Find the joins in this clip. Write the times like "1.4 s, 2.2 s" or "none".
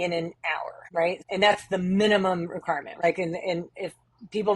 1.2 s, 3.0 s